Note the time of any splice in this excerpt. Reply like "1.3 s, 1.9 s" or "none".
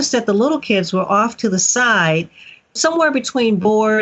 2.8 s